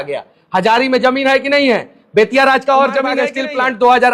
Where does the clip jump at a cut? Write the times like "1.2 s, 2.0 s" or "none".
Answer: 3.2 s